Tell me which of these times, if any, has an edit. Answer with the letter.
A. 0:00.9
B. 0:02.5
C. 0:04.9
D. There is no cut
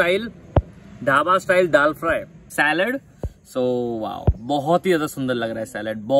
B